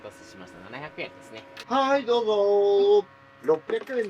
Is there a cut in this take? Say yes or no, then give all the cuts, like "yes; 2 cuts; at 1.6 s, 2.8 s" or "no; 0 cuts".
yes; 1 cut; at 1.6 s